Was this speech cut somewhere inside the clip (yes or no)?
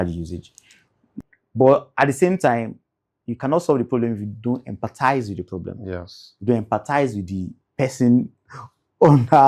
yes